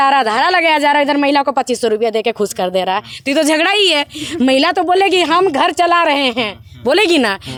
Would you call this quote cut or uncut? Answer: uncut